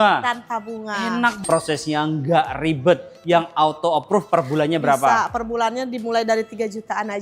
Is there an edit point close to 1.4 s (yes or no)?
yes